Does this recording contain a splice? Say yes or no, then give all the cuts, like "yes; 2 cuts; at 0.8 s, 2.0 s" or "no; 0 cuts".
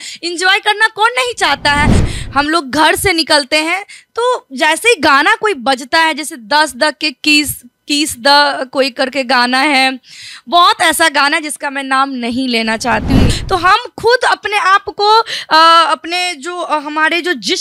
yes; 2 cuts; at 2.1 s, 13.4 s